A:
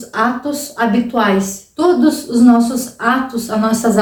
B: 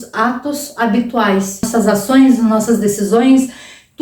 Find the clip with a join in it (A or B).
B